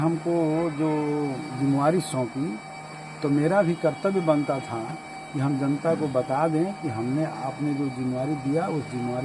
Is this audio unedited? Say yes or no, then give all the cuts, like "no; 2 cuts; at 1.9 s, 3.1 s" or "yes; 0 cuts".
yes; 0 cuts